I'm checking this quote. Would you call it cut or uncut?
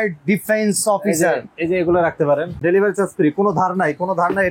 cut